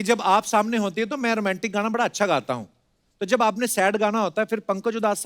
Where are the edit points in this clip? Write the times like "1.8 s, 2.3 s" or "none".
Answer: none